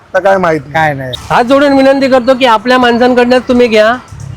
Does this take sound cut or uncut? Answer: cut